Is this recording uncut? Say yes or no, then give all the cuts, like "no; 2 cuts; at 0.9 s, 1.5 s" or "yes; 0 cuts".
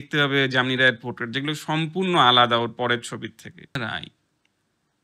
no; 1 cut; at 3.8 s